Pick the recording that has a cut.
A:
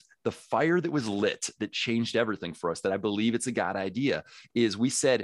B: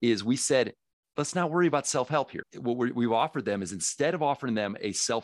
B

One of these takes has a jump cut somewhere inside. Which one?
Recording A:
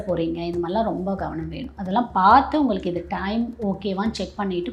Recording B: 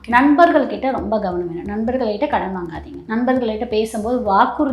B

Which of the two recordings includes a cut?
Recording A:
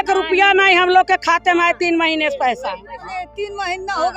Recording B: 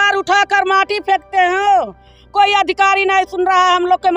A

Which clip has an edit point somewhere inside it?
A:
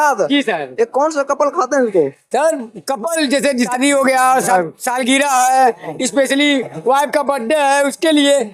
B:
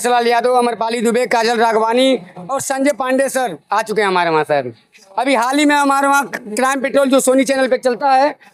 A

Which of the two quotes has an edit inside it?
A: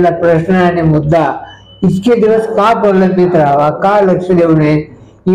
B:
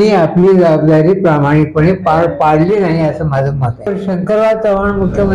B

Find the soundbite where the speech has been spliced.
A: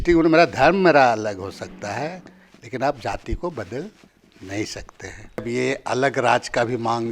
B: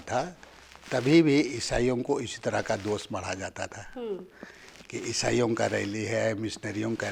A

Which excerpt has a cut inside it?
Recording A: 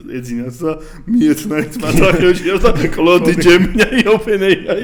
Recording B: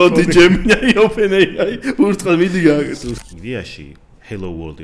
B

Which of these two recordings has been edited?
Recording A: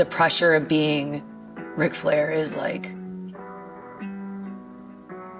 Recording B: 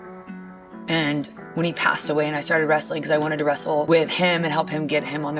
B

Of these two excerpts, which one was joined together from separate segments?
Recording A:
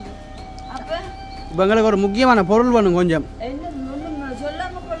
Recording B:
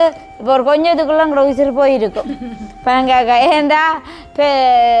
A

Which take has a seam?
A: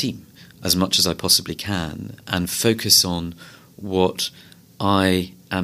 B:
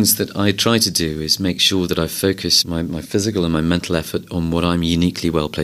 B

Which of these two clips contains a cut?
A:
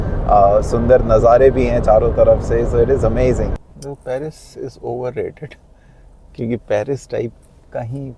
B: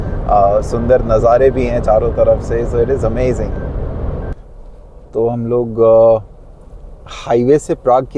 A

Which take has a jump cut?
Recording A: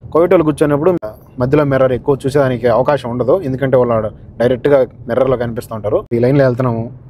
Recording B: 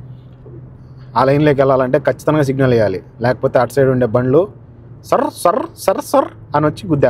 A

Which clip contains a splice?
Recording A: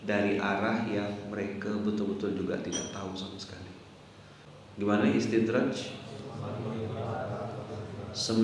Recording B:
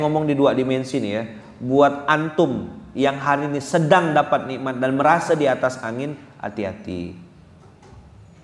A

